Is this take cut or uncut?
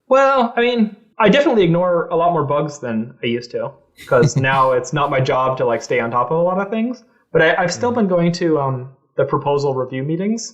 cut